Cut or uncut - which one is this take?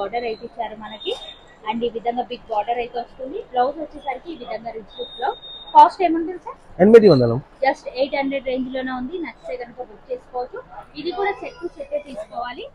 uncut